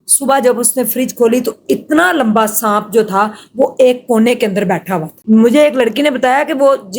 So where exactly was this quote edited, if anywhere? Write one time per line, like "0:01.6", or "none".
0:05.1